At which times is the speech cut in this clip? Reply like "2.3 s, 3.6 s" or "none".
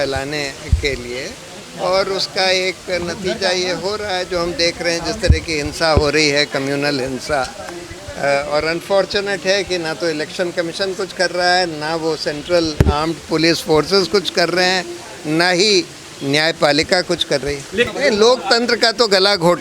17.9 s